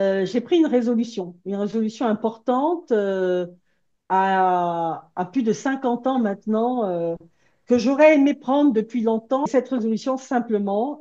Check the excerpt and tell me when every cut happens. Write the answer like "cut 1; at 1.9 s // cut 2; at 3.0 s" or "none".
cut 1; at 9.5 s